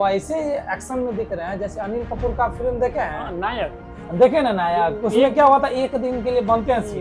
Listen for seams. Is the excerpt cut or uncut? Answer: uncut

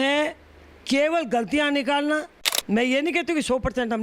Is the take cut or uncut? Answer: cut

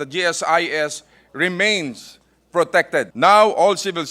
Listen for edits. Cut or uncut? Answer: cut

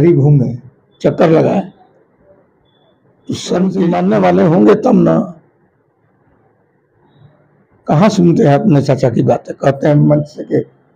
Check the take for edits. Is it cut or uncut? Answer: cut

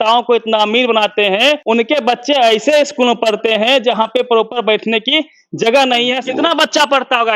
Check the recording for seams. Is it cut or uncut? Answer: cut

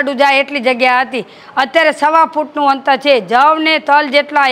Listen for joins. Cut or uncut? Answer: uncut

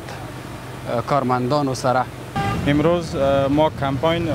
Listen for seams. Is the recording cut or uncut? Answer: cut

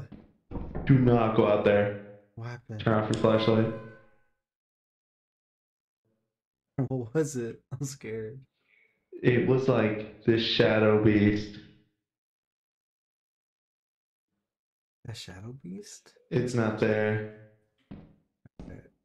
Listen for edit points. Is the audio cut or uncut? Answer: uncut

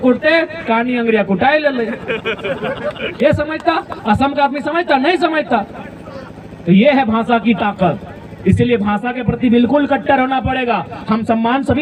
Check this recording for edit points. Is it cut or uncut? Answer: uncut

